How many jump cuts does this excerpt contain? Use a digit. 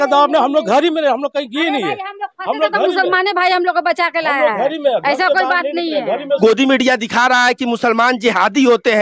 1